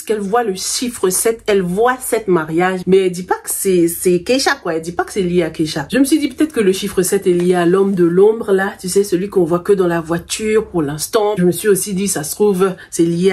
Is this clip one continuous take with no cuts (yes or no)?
yes